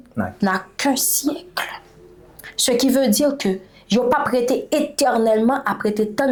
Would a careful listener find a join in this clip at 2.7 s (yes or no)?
no